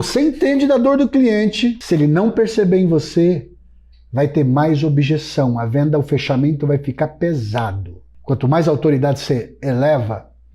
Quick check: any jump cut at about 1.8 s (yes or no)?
yes